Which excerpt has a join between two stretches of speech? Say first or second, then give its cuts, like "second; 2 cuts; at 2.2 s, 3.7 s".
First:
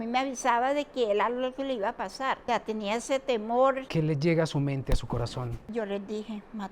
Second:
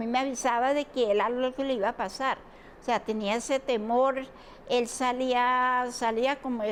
first; 3 cuts; at 2.4 s, 3.8 s, 5.6 s